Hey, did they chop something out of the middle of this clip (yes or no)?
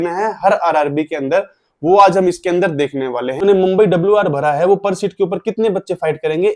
yes